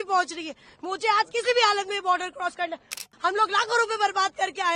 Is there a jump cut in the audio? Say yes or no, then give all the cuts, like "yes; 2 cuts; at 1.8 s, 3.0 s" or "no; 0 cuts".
yes; 1 cut; at 3.0 s